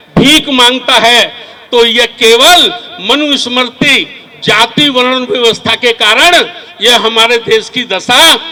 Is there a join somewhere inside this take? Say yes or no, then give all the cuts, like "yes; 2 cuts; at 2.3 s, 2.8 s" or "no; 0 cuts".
no; 0 cuts